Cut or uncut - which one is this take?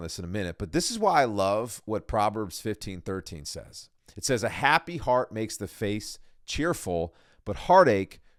uncut